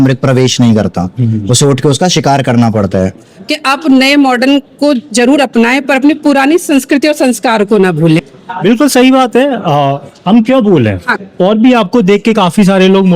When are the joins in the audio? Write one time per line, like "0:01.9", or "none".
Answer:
0:03.3
0:08.2
0:11.1